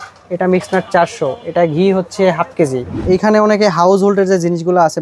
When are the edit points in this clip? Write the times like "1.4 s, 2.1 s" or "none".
3.0 s